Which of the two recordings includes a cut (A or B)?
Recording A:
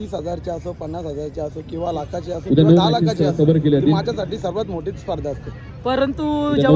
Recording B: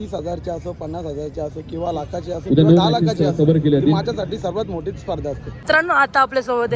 B